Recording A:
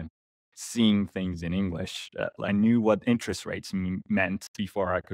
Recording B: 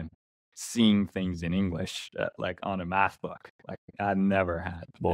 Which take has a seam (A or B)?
A